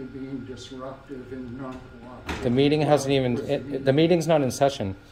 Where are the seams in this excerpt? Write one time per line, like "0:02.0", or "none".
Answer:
none